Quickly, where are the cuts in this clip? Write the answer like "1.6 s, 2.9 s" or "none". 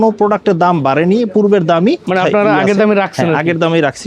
2.0 s